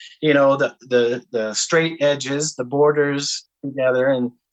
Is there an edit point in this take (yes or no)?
no